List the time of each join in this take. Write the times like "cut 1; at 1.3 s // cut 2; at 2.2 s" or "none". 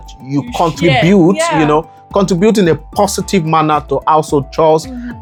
none

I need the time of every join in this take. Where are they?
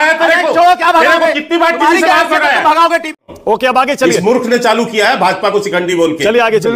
cut 1; at 3.2 s

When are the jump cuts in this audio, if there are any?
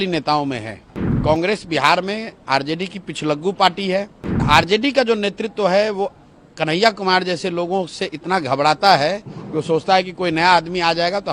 cut 1; at 1.2 s // cut 2; at 4.4 s

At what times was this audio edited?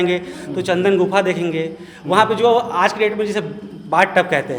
none

